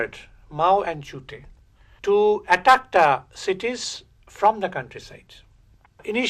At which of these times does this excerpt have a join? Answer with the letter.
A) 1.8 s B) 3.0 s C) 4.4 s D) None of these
D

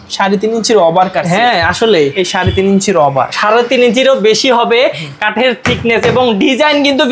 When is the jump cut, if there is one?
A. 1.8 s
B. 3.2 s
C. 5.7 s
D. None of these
D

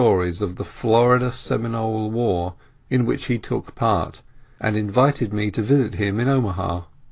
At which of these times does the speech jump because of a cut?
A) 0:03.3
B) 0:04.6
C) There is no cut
C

